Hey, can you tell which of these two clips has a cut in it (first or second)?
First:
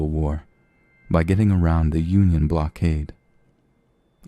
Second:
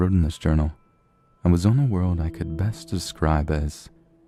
first